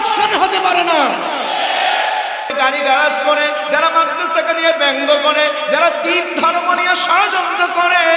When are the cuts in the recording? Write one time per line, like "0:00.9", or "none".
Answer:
0:02.6